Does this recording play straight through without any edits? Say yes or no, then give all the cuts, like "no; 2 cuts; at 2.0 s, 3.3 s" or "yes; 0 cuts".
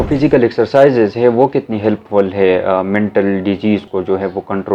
no; 1 cut; at 3.8 s